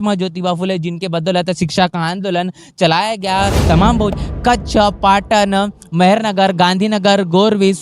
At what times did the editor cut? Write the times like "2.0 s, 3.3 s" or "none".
4.2 s